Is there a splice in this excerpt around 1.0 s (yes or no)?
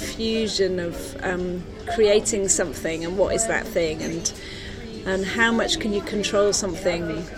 no